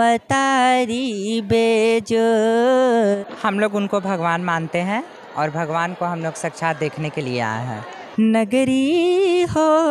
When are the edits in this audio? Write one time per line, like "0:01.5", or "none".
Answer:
0:03.2
0:08.0